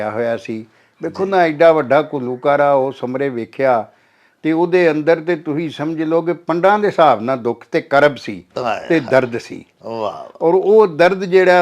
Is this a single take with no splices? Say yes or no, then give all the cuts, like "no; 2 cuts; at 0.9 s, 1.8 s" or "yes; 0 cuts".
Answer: yes; 0 cuts